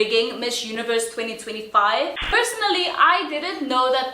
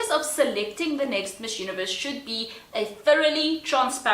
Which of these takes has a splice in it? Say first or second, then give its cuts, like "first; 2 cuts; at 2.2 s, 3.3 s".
first; 1 cut; at 2.3 s